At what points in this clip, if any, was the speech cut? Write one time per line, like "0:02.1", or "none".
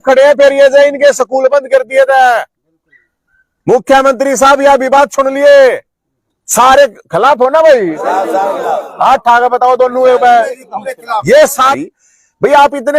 0:11.7